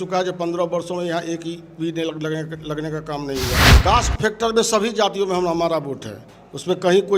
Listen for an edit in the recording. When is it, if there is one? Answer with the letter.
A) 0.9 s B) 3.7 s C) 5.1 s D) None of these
B